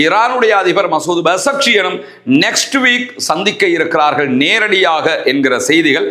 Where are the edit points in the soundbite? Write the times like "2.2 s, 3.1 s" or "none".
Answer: none